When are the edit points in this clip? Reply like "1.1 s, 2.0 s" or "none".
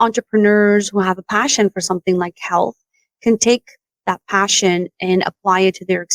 none